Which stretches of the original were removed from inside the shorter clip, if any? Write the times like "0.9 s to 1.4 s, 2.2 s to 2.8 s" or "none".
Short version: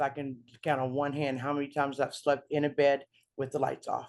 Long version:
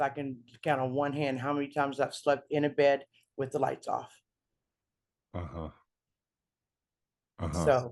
none